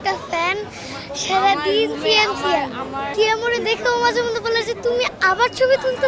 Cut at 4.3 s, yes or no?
no